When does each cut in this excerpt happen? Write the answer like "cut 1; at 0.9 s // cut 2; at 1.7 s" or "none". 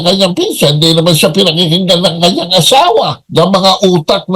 cut 1; at 3.2 s